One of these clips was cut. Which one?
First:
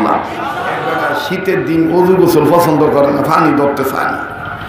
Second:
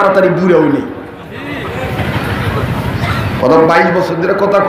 first; 1 cut; at 1.0 s

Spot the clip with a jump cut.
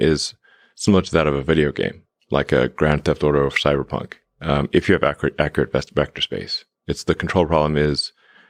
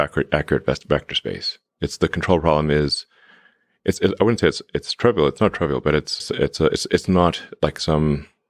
second; 1 cut; at 6.2 s

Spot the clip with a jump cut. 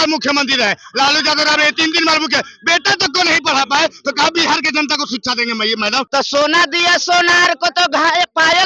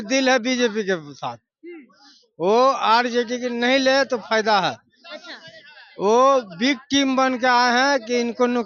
first; 1 cut; at 6.1 s

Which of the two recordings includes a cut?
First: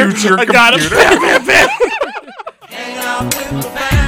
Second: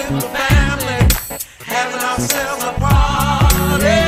first; 1 cut; at 2.3 s

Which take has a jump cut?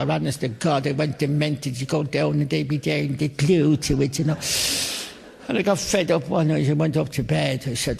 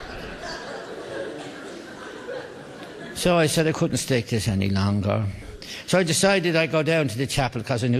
second; 1 cut; at 3.8 s

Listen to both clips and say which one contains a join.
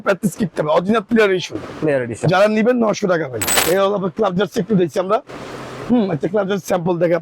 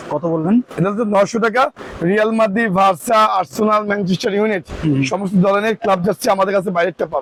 first; 1 cut; at 3.5 s

